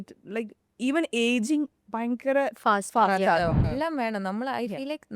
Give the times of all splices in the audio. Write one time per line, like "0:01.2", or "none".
0:03.7